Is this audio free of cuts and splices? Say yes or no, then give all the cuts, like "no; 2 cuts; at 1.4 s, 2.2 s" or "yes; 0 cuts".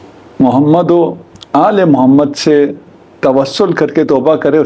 yes; 0 cuts